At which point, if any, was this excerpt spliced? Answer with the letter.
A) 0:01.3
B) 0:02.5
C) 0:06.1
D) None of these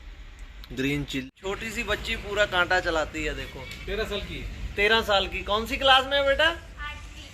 A